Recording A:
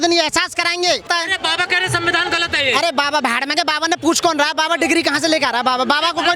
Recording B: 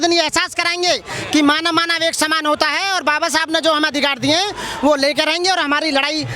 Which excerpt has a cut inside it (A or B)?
A